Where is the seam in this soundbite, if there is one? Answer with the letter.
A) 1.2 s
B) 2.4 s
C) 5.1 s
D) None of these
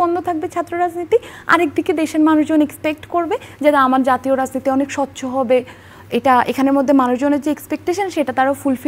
D